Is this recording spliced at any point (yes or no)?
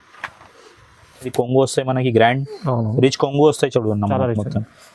yes